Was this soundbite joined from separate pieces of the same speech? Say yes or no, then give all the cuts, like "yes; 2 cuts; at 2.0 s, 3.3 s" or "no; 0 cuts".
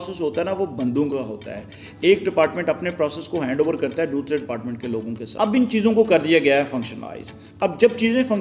yes; 1 cut; at 5.2 s